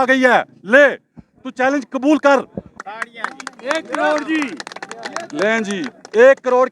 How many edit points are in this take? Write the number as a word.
one